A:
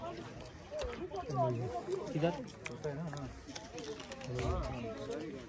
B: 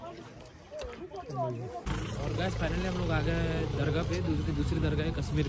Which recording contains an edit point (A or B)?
B